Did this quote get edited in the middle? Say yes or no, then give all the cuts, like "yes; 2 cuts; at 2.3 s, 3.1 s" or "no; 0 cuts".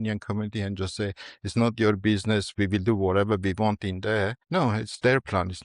yes; 1 cut; at 4.4 s